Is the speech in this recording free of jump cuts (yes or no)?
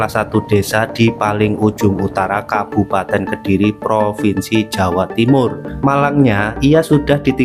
no